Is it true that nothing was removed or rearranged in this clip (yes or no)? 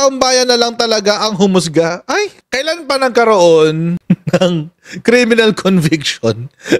no